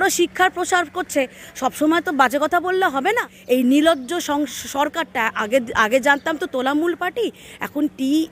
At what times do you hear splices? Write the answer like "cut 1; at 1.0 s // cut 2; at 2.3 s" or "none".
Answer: cut 1; at 3.0 s